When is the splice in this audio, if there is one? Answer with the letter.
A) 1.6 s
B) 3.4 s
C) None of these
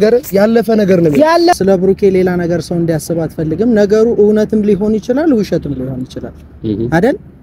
A